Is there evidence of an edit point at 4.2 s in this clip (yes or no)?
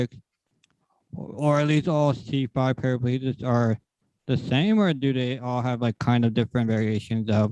no